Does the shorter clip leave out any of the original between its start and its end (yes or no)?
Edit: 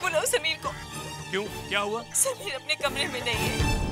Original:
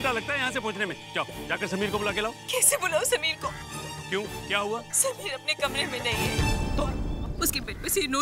no